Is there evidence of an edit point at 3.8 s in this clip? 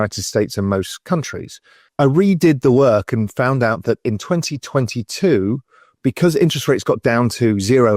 no; 1 cut; at 1.8 s

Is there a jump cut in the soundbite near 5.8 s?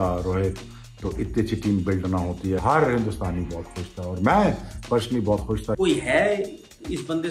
yes; 2 cuts; at 2.6 s, 5.8 s

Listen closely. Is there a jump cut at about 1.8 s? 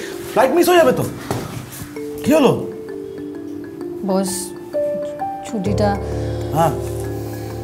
no; 0 cuts

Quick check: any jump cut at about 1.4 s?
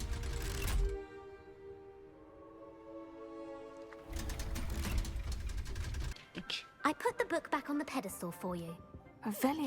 no; 1 cut; at 6.1 s

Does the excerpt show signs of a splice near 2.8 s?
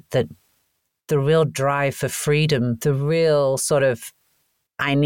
yes; 1 cut; at 2.8 s

